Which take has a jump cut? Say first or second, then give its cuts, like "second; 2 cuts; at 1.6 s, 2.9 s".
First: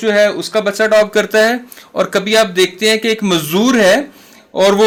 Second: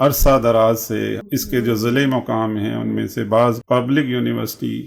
second; 2 cuts; at 1.2 s, 3.6 s